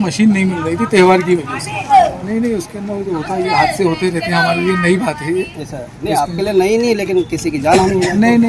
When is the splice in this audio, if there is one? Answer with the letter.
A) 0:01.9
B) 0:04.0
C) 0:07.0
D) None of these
A